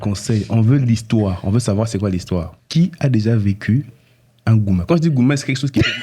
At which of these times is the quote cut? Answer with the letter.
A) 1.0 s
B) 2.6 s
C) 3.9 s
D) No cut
B